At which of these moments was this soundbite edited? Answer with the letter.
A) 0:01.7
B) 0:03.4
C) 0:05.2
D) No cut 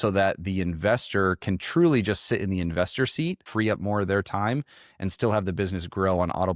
B